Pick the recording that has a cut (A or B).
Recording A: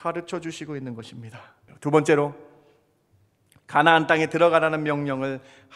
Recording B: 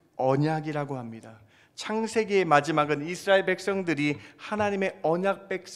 A